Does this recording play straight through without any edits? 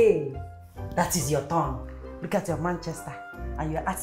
no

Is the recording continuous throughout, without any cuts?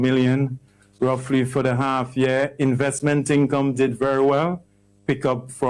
yes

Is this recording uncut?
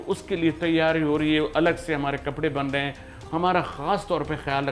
yes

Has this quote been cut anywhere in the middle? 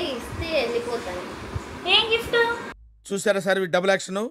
no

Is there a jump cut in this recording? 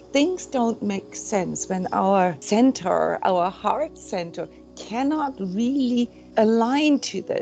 yes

